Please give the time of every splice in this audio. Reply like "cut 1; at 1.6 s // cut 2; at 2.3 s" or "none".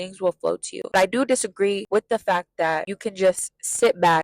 cut 1; at 0.9 s // cut 2; at 1.8 s // cut 3; at 2.9 s